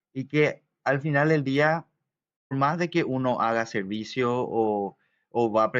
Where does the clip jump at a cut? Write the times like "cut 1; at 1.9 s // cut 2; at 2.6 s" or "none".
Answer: cut 1; at 2.5 s